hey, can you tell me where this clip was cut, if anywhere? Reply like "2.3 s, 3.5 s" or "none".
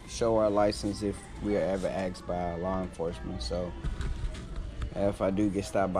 none